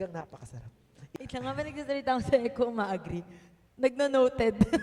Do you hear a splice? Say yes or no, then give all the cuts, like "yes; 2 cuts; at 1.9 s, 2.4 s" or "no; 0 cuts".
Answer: yes; 1 cut; at 1.0 s